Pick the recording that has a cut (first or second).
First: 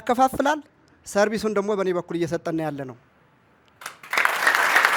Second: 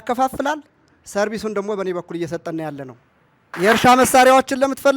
second